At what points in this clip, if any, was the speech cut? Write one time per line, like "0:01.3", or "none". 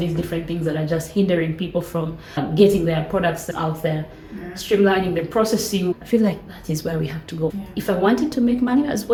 none